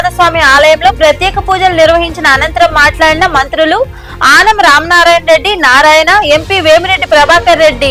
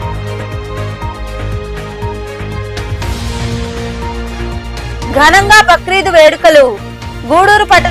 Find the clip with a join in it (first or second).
second